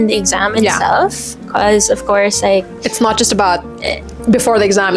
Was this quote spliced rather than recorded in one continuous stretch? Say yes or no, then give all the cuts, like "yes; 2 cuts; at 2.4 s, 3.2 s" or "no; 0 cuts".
no; 0 cuts